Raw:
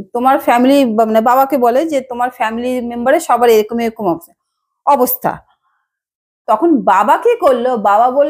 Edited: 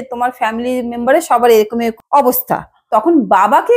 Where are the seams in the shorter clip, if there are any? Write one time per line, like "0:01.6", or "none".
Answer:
0:02.0
0:02.7